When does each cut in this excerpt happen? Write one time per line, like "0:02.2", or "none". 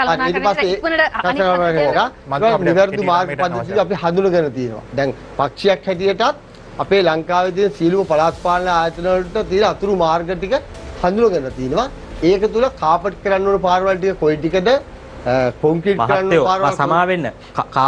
none